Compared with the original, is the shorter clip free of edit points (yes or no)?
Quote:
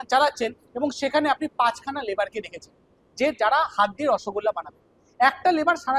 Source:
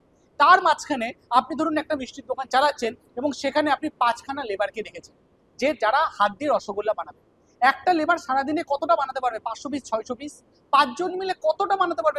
yes